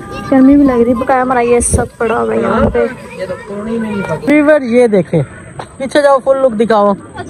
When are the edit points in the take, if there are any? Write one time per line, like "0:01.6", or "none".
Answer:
0:04.3